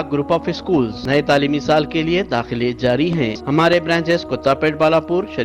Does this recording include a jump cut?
yes; 2 cuts; at 1.0 s, 3.4 s

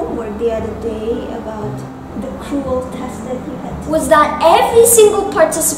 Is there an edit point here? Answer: yes; 1 cut; at 3.7 s

